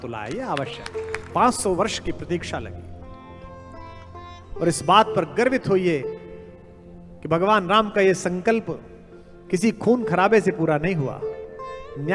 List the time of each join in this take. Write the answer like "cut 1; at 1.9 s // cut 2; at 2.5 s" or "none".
cut 1; at 1.2 s